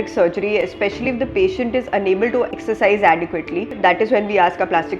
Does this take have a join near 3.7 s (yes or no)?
yes